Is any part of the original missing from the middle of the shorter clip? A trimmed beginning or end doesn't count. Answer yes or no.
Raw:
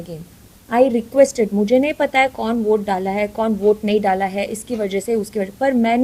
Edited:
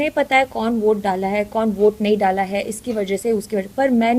no